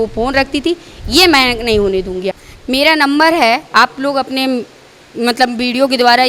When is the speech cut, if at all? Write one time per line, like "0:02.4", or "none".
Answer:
0:02.3